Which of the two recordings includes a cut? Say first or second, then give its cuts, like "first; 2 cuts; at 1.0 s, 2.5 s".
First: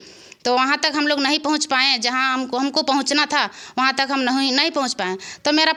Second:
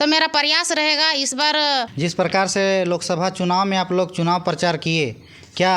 second; 1 cut; at 1.9 s